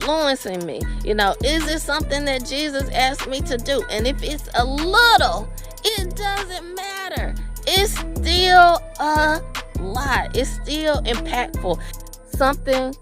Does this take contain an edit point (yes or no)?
yes